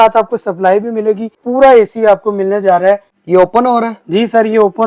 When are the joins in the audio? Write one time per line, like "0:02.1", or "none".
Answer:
0:01.4
0:03.1